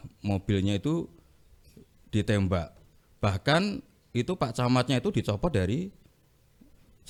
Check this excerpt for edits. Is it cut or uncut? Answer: uncut